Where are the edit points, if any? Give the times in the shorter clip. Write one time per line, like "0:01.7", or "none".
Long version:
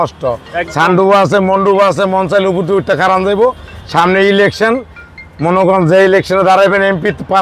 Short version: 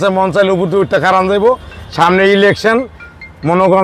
none